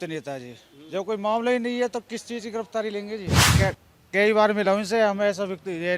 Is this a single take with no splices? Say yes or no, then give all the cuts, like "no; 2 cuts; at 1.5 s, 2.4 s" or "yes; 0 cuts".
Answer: no; 1 cut; at 3.5 s